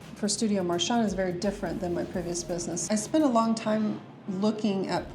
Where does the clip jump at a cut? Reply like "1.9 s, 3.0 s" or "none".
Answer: 2.8 s